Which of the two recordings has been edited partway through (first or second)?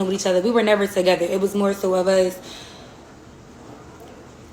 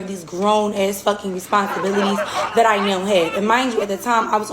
second